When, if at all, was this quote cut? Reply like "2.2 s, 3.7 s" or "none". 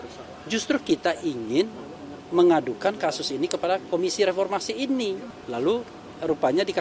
5.3 s